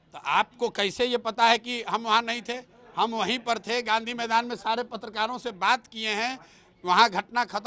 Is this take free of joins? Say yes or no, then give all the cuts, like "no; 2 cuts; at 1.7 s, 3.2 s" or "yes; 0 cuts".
yes; 0 cuts